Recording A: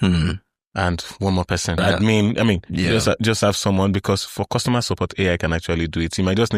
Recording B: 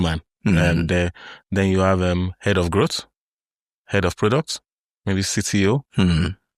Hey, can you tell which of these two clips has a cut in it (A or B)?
A